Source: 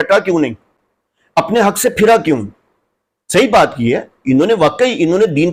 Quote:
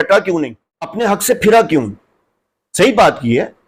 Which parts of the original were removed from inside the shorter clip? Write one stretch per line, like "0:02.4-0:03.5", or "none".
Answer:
0:00.9-0:01.5